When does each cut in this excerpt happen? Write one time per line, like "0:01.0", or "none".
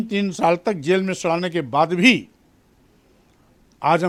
none